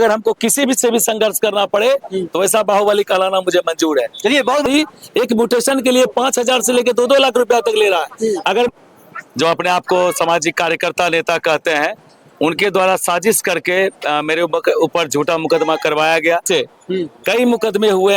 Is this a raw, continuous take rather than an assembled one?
no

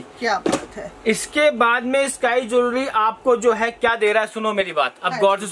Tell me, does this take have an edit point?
no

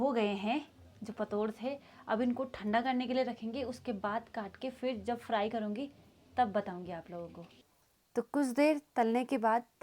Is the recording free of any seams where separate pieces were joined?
yes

